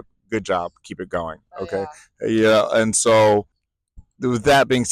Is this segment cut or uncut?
cut